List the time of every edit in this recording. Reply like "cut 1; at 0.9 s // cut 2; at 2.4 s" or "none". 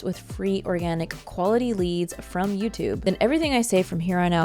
cut 1; at 3.0 s